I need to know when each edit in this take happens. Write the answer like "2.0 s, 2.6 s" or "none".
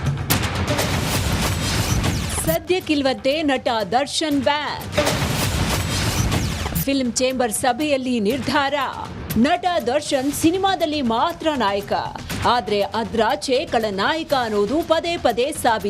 8.8 s